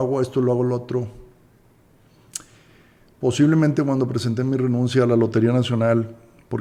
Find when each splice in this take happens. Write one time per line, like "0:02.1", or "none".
none